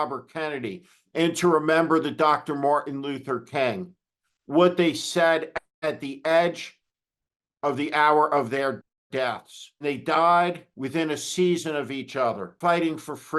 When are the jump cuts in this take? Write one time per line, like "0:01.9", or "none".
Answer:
0:09.8
0:10.7
0:12.5